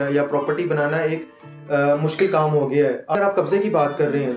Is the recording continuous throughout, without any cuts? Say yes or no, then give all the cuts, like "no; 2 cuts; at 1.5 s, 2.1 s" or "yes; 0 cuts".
no; 1 cut; at 3.1 s